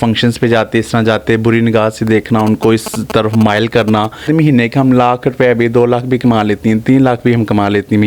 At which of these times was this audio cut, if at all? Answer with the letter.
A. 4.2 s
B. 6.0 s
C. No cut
A